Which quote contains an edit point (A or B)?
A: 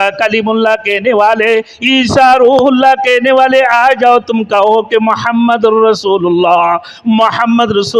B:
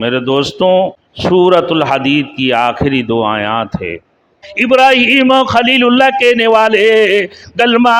B